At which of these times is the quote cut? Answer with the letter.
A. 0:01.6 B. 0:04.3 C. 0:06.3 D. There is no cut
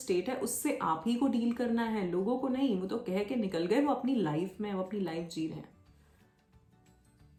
D